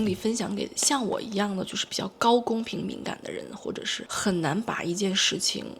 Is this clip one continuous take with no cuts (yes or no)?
no